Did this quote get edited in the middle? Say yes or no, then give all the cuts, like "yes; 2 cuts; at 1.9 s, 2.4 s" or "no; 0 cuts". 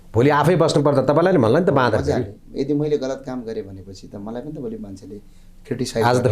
no; 0 cuts